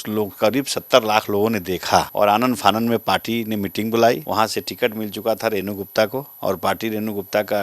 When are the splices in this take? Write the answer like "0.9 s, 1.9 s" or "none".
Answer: 2.1 s, 4.2 s, 6.3 s